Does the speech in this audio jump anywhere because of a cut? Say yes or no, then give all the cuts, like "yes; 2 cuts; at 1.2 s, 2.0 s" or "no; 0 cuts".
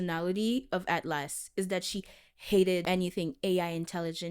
yes; 1 cut; at 2.8 s